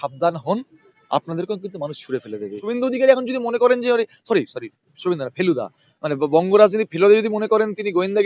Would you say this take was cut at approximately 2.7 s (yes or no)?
yes